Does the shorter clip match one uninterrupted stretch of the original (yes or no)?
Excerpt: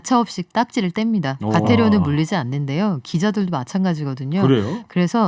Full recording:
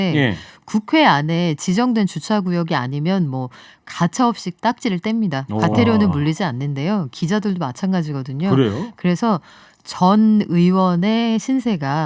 yes